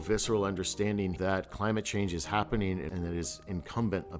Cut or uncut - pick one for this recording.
cut